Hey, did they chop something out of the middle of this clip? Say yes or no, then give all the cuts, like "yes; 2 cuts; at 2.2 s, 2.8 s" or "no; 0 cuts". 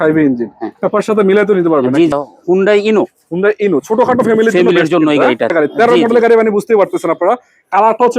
yes; 2 cuts; at 2.1 s, 5.5 s